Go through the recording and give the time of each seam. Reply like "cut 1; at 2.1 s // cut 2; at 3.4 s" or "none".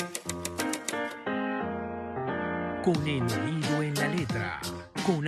none